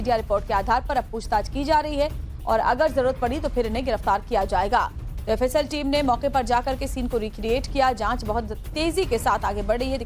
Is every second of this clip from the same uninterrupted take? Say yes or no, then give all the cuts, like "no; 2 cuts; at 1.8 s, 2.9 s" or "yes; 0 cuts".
no; 1 cut; at 6.8 s